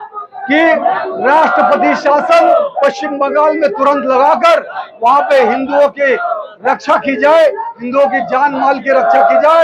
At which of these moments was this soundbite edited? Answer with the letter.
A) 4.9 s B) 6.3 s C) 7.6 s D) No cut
D